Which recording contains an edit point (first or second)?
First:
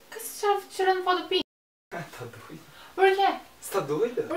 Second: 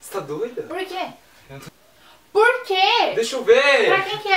second